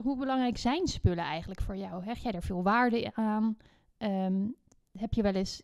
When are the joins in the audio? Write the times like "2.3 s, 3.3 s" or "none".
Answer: none